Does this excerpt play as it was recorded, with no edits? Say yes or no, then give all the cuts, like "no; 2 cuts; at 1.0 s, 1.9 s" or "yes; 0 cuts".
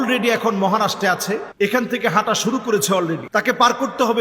no; 2 cuts; at 1.5 s, 3.2 s